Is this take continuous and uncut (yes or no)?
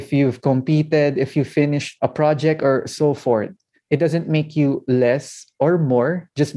yes